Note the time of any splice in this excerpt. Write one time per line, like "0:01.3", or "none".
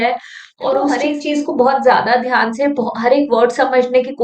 0:01.0